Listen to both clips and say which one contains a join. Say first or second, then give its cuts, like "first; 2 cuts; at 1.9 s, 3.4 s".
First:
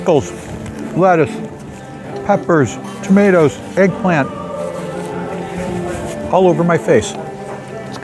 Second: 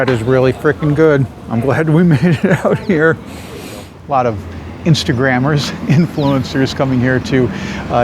second; 1 cut; at 4.0 s